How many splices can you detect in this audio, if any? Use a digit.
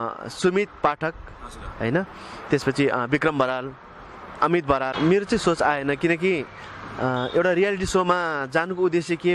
1